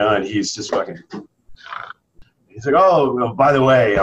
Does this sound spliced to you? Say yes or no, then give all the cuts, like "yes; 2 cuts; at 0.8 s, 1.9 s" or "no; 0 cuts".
yes; 1 cut; at 2.1 s